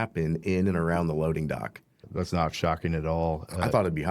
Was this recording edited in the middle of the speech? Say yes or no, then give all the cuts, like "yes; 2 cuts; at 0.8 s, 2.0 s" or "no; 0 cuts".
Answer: yes; 1 cut; at 2.0 s